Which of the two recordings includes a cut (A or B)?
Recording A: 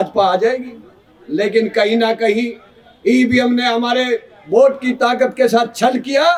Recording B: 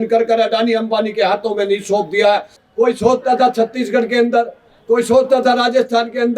B